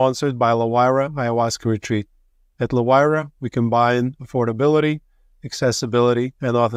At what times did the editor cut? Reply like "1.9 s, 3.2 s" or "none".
none